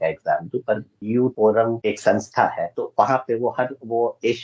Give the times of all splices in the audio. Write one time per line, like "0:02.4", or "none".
0:00.9